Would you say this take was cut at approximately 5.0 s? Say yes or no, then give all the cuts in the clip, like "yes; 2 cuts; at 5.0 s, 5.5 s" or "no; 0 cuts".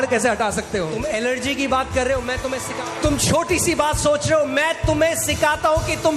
no; 2 cuts; at 0.9 s, 2.7 s